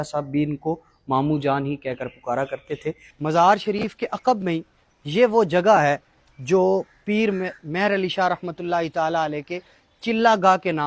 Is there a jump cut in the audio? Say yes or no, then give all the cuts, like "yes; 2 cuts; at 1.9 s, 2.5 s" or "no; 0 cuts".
yes; 1 cut; at 3.1 s